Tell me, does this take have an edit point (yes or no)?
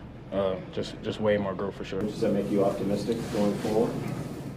yes